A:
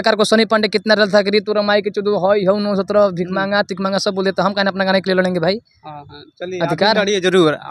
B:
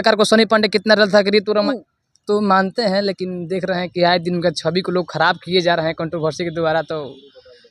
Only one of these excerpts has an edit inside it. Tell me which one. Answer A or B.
B